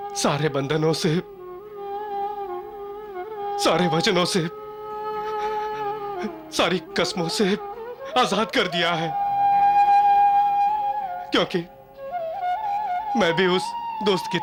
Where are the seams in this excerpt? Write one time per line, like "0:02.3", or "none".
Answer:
none